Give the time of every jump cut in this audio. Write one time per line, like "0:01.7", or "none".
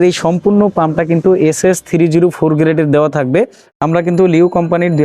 0:03.6